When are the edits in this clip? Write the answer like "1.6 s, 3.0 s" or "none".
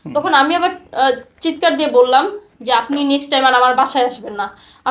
none

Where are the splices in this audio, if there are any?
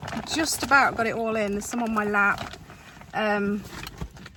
none

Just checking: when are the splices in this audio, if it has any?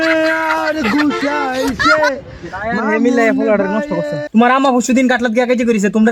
4.2 s

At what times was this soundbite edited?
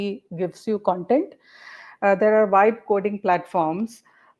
none

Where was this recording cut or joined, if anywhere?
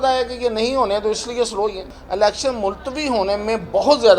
1.8 s

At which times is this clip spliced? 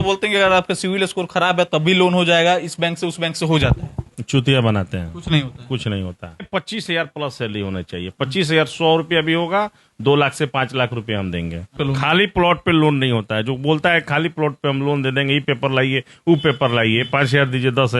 6.5 s, 11.8 s

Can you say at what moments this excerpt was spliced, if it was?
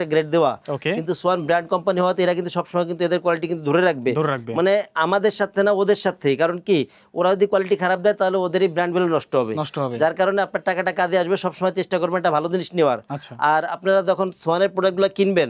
none

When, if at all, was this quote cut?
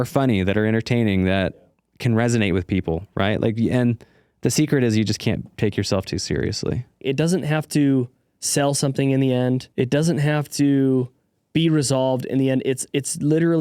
7.0 s, 9.7 s

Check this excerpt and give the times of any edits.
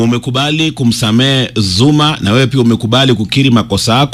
none

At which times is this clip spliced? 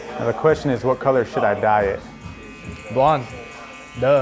none

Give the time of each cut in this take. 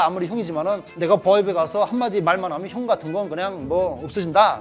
none

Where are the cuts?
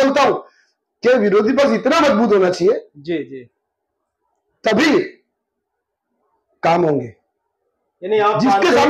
none

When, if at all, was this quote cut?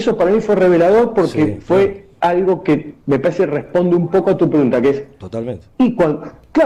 none

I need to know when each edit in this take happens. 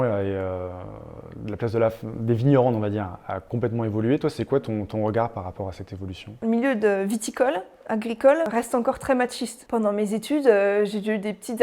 6.4 s, 8.5 s, 9.5 s

